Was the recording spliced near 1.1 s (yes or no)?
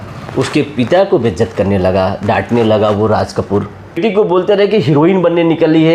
no